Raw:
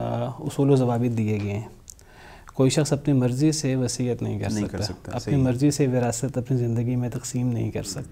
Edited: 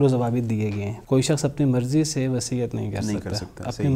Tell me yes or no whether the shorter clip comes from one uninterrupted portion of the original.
no